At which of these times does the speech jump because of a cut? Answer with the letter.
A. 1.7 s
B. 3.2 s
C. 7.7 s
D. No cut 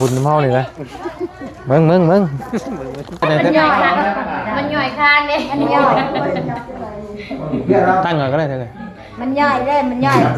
B